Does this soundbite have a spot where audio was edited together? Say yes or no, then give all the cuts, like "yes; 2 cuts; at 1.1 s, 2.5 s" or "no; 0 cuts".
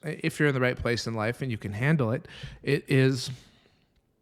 no; 0 cuts